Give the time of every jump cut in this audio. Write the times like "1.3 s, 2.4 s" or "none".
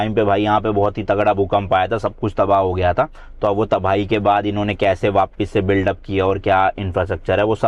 none